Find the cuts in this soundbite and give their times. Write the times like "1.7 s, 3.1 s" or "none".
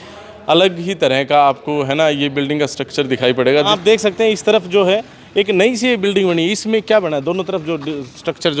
3.7 s